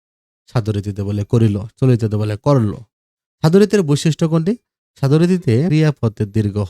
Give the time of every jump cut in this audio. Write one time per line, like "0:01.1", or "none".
0:05.7